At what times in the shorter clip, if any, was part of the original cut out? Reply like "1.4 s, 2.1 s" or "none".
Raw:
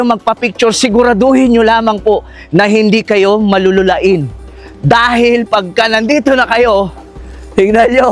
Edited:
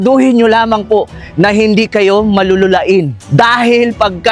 3.2 s